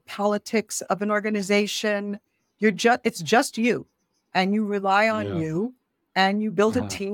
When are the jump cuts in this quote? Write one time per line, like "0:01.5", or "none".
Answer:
none